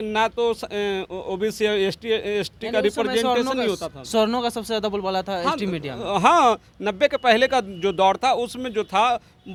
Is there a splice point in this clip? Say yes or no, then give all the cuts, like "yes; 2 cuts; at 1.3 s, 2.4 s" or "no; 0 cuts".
no; 0 cuts